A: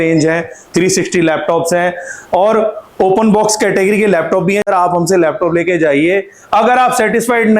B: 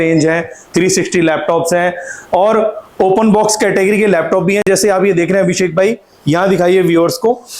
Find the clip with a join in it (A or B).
A